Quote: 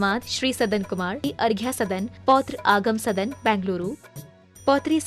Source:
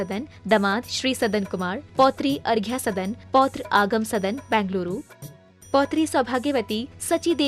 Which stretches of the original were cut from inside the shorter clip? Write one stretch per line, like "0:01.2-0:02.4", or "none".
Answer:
0:01.9-0:02.3

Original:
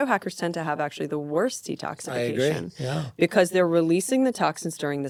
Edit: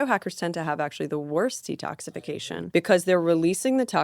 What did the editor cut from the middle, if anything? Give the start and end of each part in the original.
0:02.1-0:02.6

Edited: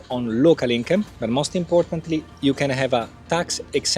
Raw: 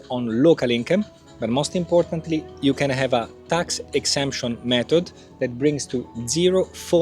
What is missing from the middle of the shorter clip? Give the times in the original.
0:01.2-0:01.3

